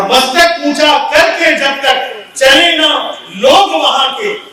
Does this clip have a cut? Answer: no; 0 cuts

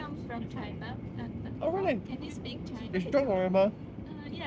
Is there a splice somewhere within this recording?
no; 0 cuts

